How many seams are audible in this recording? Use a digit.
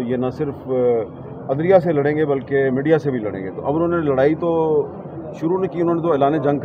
0